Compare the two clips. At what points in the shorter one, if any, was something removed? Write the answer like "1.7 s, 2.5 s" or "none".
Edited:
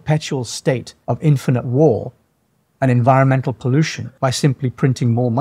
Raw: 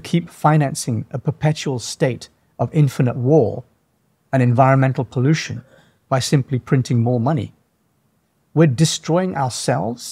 0.9 s, 4.0 s